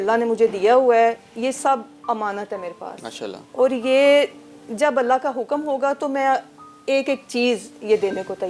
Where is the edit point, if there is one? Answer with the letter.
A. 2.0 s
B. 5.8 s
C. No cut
C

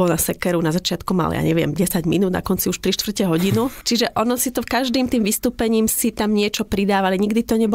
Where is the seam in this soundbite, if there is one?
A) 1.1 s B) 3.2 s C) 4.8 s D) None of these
D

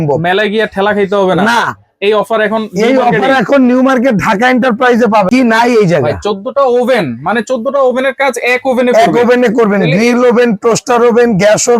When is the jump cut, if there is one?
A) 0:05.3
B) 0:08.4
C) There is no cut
A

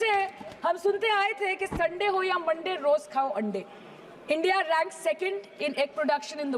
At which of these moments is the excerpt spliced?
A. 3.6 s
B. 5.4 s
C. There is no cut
C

